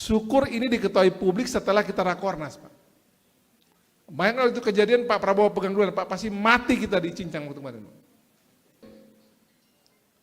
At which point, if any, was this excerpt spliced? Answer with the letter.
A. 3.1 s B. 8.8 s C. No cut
B